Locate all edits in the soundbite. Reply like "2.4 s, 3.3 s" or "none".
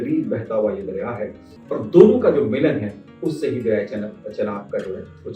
1.5 s